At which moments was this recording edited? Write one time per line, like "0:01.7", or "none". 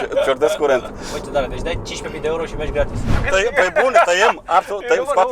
0:01.1
0:03.2